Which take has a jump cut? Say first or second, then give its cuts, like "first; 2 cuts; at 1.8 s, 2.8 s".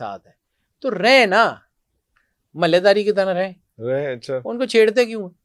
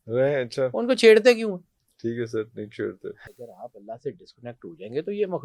second; 1 cut; at 3.4 s